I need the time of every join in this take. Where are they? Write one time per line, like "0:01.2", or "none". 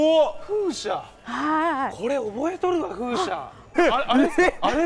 0:03.7